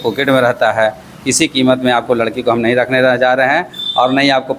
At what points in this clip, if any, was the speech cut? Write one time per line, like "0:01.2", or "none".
none